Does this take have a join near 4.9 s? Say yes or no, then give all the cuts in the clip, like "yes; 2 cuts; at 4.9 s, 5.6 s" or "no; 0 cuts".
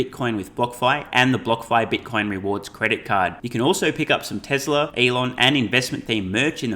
yes; 1 cut; at 4.9 s